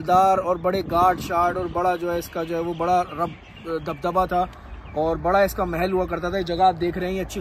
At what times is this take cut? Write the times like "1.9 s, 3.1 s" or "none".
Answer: none